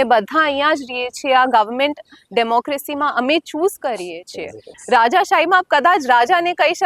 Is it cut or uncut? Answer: cut